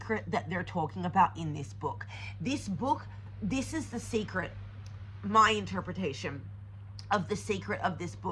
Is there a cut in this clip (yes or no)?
no